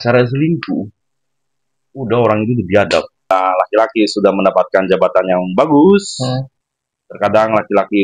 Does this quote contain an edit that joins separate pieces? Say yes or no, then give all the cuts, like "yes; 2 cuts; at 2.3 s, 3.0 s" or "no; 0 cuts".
yes; 1 cut; at 3.3 s